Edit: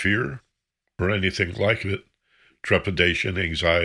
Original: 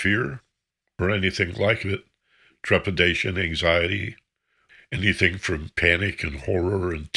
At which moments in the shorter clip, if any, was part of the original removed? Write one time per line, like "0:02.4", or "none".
none